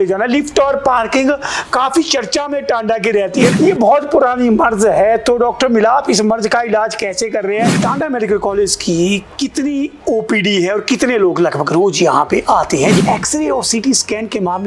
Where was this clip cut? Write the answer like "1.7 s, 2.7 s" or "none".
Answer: 3.5 s, 7.7 s, 13.0 s